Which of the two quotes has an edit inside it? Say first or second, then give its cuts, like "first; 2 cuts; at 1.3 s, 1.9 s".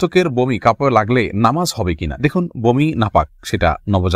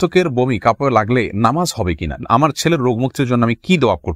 second; 1 cut; at 2.2 s